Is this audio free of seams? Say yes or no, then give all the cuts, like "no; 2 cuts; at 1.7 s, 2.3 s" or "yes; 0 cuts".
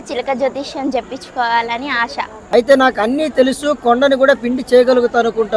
no; 1 cut; at 2.4 s